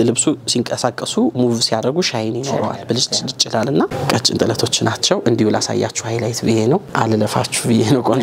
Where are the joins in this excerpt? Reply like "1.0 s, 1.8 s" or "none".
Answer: 3.9 s, 6.9 s